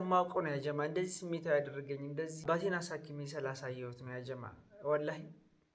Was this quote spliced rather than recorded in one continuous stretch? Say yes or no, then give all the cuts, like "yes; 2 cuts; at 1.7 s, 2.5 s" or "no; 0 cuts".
yes; 1 cut; at 2.4 s